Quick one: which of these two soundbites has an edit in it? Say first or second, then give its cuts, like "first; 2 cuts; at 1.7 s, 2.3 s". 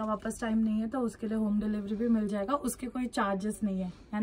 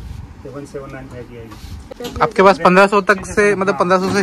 second; 1 cut; at 2.0 s